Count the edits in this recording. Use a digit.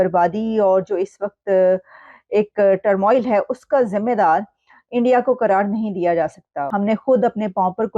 1